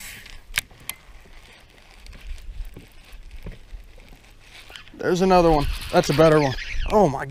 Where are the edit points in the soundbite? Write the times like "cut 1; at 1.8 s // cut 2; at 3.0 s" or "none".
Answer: none